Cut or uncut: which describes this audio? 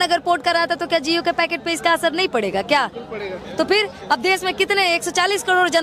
uncut